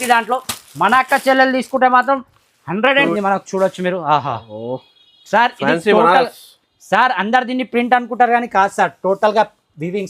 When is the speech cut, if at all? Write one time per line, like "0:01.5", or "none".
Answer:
0:03.0